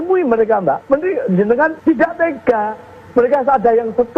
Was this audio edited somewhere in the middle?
yes; 2 cuts; at 0.8 s, 1.8 s

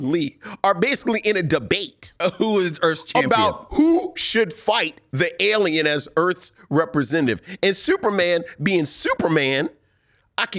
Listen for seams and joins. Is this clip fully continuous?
yes; 0 cuts

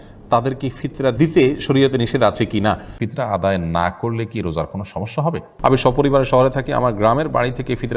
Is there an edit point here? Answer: yes; 3 cuts; at 1.2 s, 3.0 s, 5.5 s

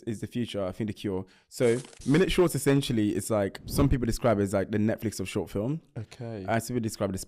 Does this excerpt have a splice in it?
yes; 2 cuts; at 1.9 s, 3.6 s

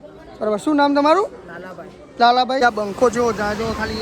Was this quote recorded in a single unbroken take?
no; 1 cut; at 2.6 s

